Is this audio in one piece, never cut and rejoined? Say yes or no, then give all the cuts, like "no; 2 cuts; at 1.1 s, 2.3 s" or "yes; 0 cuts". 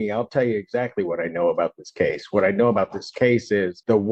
yes; 0 cuts